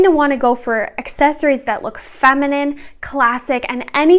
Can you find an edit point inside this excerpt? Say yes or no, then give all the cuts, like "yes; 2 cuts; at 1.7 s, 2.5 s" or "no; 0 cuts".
no; 0 cuts